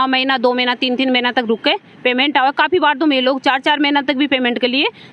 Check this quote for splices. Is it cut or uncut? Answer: uncut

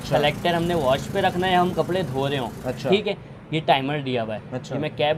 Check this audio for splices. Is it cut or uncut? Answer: uncut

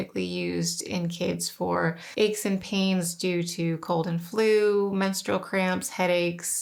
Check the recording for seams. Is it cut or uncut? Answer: uncut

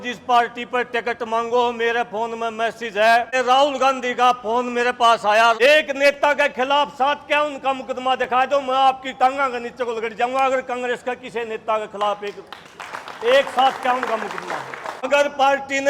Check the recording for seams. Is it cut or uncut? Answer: cut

